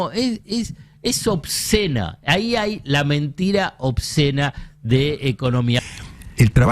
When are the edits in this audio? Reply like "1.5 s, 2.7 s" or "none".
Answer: 5.8 s